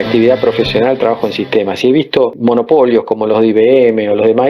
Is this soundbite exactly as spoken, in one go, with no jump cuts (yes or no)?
no